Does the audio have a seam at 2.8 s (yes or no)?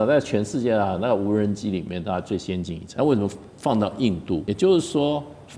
yes